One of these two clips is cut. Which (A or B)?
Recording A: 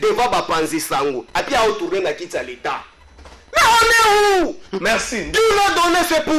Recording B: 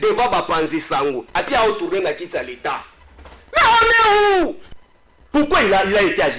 B